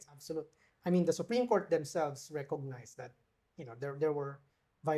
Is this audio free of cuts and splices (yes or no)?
yes